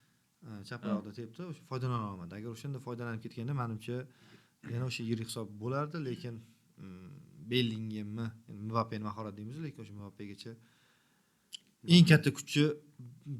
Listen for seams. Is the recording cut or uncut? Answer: uncut